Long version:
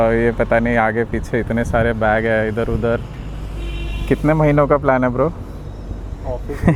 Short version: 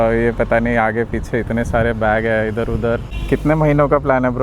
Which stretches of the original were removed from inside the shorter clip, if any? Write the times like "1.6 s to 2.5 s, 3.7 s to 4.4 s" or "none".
3.1 s to 3.9 s